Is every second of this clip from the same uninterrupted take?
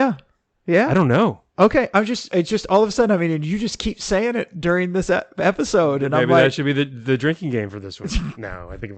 yes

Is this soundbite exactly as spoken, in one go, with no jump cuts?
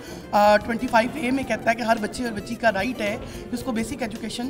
yes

